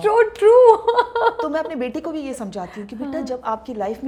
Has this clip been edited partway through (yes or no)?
no